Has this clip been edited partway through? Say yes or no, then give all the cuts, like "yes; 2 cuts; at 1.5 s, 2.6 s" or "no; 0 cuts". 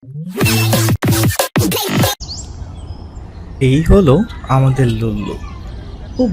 yes; 1 cut; at 0.9 s